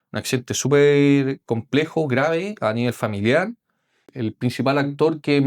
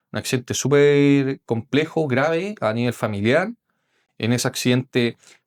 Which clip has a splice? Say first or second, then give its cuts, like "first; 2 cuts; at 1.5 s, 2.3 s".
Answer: first; 1 cut; at 4.1 s